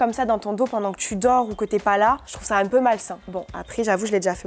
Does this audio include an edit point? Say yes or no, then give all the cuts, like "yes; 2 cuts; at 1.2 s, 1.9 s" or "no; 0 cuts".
no; 0 cuts